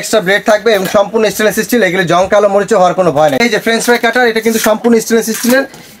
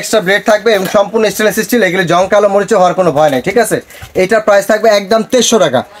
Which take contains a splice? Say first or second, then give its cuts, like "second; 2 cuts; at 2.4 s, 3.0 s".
first; 1 cut; at 3.4 s